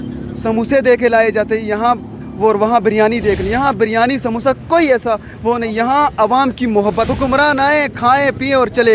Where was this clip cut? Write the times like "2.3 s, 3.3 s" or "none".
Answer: 7.0 s